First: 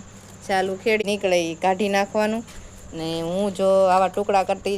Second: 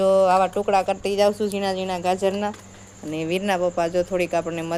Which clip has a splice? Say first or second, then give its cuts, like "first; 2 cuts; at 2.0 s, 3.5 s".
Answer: first; 1 cut; at 1.0 s